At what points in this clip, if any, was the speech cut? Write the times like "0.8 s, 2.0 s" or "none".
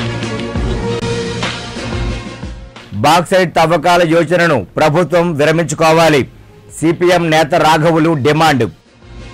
0.9 s

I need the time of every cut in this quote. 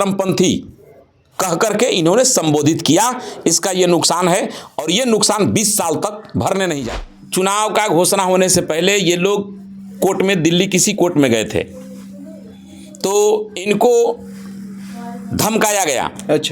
7.0 s

